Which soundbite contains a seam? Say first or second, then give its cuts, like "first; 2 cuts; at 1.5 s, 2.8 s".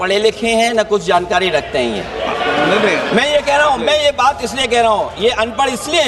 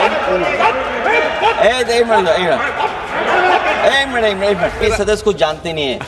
second; 1 cut; at 4.8 s